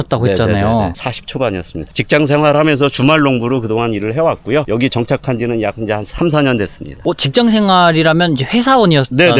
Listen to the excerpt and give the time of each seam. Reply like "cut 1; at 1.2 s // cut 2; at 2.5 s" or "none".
cut 1; at 7.0 s